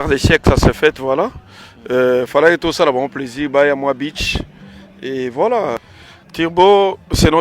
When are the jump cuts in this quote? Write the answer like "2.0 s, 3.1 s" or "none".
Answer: 5.8 s